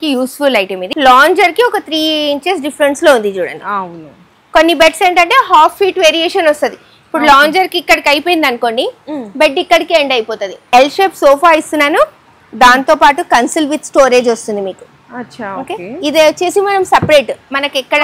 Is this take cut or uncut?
cut